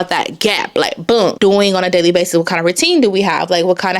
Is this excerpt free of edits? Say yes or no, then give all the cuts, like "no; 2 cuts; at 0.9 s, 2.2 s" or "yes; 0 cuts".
no; 1 cut; at 1.4 s